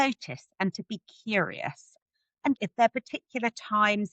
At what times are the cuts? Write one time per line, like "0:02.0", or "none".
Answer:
0:02.2

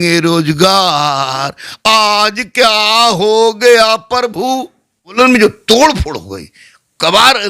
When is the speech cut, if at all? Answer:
0:05.1

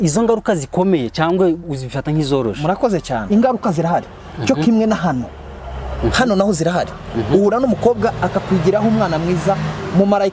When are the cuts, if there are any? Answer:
0:03.3

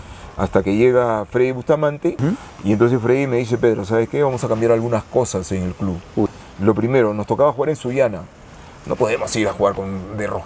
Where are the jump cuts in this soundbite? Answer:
0:02.2
0:06.4

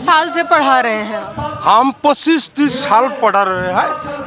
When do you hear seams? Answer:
none

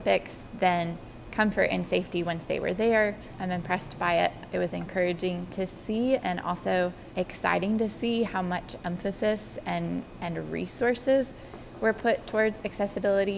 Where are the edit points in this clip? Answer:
0:03.3

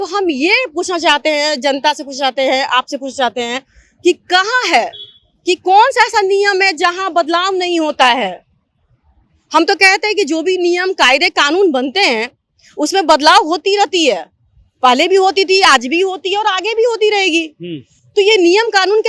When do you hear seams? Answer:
none

